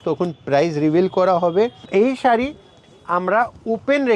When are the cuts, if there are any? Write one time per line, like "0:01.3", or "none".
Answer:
0:01.8